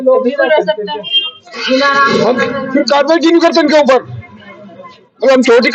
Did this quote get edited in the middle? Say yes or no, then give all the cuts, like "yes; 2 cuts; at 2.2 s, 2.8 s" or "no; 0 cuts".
no; 0 cuts